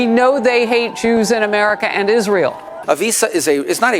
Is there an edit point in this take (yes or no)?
yes